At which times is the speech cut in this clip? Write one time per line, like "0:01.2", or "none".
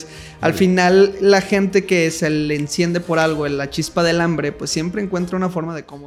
none